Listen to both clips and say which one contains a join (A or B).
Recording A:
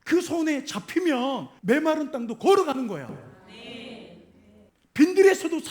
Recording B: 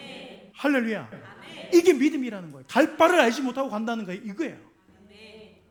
A